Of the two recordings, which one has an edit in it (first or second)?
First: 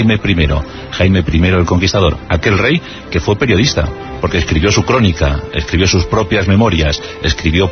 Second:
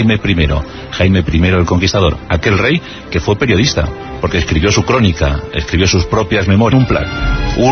first